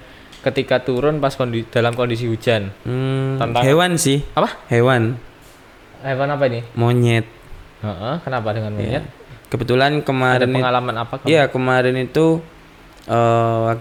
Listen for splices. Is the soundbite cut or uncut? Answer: uncut